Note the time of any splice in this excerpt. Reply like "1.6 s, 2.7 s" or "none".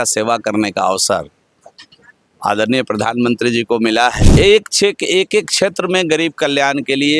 4.2 s